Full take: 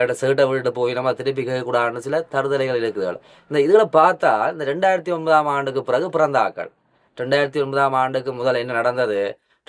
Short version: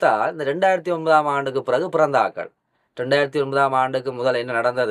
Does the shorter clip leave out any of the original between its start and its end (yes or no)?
no